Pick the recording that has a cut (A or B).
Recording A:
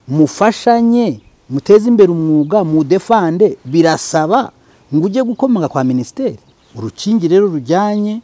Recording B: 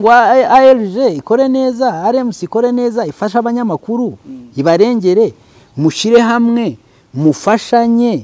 A